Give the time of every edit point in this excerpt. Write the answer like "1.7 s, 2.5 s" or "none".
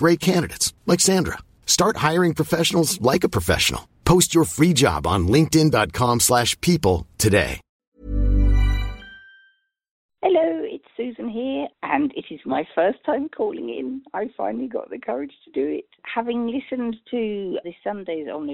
10.1 s, 11.7 s, 15.7 s, 17.6 s